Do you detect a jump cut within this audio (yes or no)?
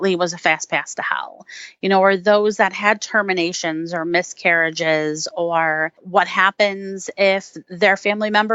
yes